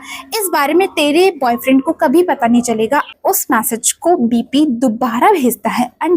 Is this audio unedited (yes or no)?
no